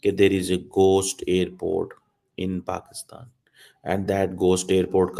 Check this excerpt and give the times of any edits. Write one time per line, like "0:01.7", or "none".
none